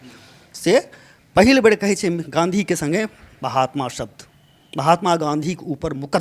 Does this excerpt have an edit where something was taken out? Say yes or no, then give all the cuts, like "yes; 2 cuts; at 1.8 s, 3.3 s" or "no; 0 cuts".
no; 0 cuts